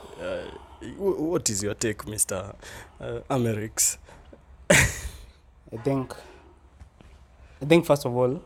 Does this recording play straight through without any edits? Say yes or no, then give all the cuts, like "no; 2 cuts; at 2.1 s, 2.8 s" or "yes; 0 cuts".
yes; 0 cuts